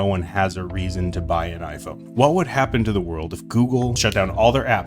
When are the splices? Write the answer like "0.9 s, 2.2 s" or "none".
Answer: 2.0 s, 4.0 s